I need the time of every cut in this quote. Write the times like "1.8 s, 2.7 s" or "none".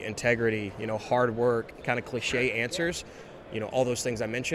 1.8 s, 3.2 s